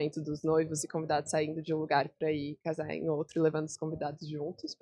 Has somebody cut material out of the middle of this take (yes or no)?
no